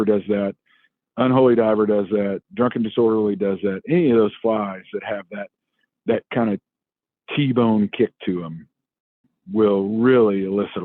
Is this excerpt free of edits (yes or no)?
no